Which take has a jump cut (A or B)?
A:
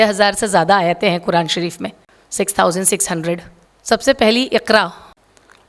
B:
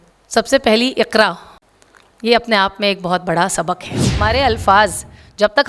B